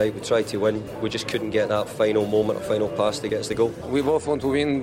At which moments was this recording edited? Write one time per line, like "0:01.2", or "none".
0:03.5